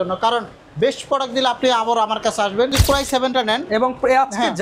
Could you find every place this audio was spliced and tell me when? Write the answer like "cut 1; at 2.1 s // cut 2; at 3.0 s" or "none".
cut 1; at 2.8 s